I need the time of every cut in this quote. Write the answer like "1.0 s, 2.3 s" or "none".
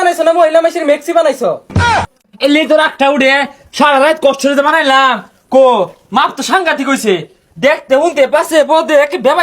2.0 s

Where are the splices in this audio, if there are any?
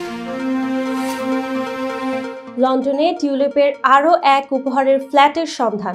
2.4 s

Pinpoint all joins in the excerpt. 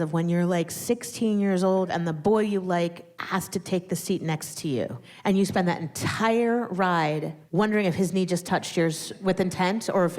1.9 s, 3.1 s, 5.1 s, 7.4 s, 9.1 s

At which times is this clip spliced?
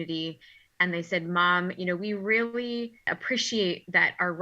3.2 s

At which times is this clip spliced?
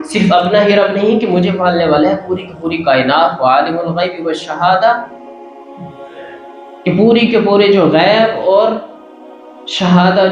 none

